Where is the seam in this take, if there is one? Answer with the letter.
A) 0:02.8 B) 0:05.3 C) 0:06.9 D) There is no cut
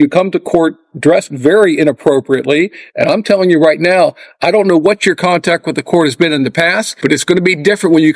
C